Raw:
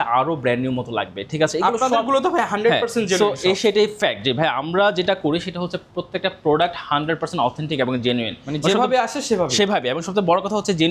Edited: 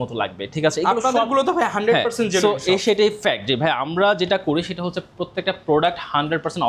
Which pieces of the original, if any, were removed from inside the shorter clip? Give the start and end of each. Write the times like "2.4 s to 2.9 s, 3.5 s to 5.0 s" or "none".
none